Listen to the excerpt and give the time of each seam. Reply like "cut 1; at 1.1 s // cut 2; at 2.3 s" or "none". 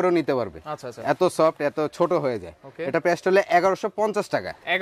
none